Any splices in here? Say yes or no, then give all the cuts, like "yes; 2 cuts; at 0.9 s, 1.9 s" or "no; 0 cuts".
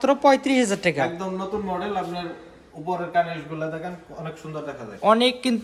no; 0 cuts